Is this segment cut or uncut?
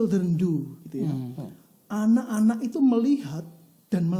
uncut